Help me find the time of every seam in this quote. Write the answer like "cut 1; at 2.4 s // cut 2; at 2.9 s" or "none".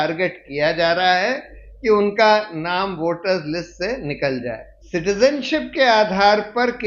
cut 1; at 4.7 s